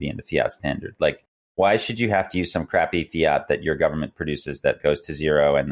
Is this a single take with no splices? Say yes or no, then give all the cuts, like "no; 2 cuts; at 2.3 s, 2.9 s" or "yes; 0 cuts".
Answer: no; 1 cut; at 4.8 s